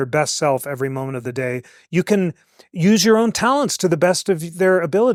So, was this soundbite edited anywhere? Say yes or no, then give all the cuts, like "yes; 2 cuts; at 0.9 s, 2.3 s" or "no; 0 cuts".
no; 0 cuts